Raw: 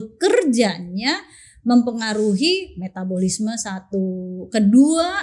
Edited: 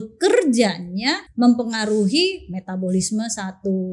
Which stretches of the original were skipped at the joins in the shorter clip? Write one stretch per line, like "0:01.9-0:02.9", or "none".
0:01.2-0:01.5